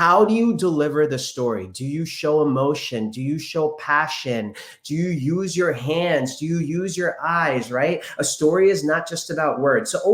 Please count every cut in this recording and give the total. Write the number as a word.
zero